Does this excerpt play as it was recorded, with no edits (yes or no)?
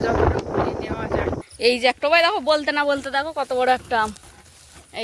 no